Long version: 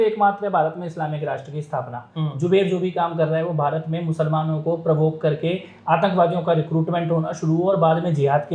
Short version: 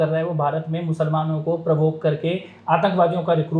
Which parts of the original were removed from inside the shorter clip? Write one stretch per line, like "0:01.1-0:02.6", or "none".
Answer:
none